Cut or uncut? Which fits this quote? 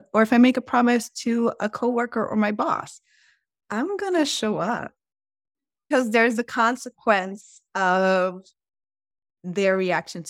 cut